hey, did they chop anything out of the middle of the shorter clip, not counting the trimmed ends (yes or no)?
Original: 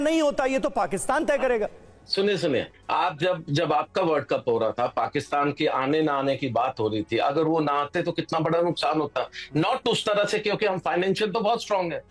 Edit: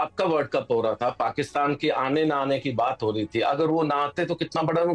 no